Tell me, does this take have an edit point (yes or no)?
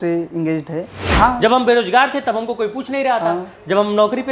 yes